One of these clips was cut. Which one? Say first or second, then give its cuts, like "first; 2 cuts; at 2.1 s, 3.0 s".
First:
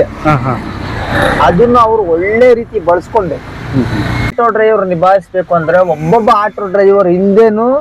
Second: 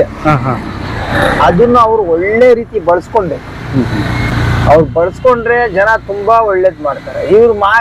first; 1 cut; at 4.3 s